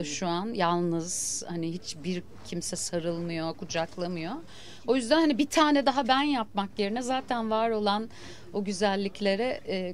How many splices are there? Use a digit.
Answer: 0